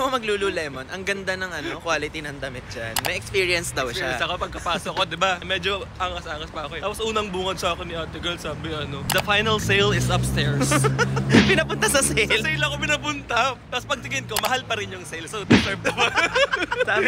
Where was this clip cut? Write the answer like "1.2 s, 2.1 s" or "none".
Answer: none